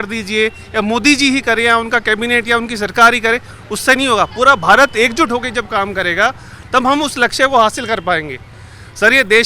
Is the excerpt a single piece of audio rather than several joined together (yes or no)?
yes